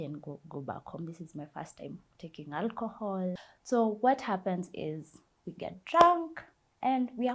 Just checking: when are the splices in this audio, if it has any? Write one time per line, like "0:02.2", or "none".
0:03.5